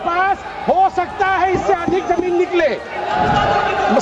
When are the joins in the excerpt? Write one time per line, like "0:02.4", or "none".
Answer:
none